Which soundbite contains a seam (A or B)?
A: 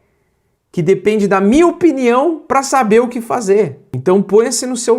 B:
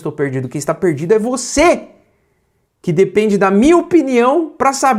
A